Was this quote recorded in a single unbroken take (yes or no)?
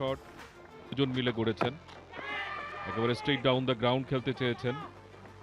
no